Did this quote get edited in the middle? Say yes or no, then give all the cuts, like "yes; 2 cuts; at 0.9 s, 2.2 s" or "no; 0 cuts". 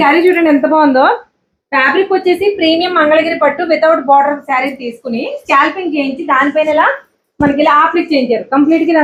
no; 0 cuts